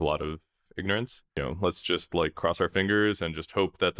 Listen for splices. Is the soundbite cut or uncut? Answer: cut